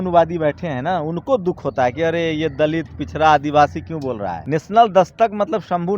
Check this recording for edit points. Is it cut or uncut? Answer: cut